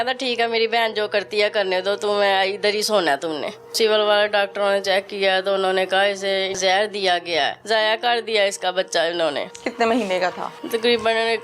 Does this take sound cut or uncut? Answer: cut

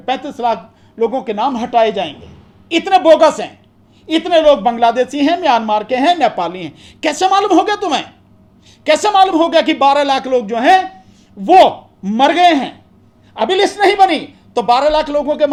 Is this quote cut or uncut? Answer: uncut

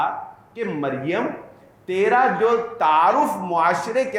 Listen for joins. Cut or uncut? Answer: uncut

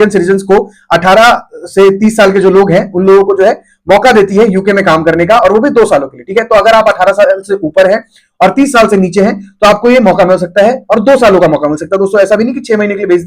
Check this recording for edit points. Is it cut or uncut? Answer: uncut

